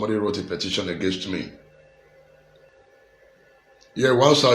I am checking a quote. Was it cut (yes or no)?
yes